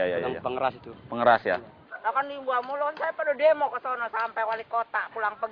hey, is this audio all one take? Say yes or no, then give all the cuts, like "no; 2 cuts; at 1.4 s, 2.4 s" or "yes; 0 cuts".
no; 1 cut; at 2.0 s